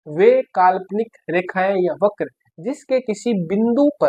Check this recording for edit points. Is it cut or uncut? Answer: uncut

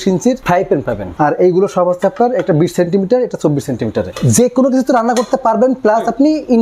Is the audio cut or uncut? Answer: cut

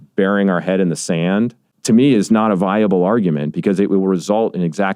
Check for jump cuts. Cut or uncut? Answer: cut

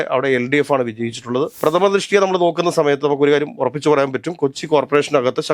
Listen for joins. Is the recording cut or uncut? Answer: cut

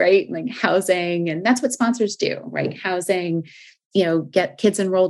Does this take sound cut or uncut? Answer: cut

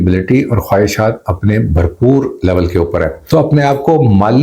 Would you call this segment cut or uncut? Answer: cut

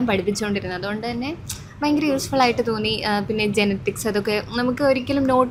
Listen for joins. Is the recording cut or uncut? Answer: uncut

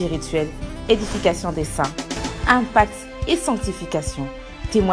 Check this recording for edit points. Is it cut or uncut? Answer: uncut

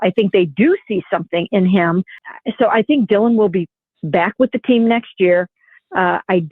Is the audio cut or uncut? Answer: cut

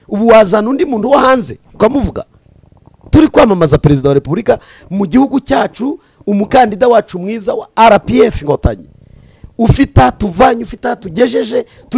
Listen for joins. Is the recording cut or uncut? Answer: uncut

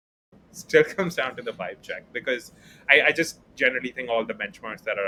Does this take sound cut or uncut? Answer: uncut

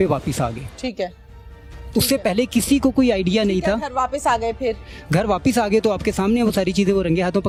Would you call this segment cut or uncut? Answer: uncut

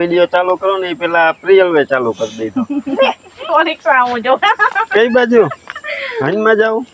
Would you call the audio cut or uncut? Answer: cut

